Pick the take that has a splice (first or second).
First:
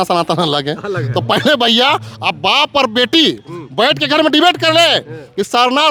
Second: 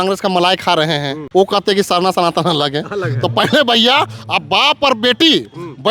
second